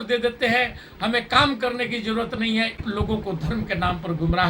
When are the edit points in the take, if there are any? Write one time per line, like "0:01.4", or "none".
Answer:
0:02.8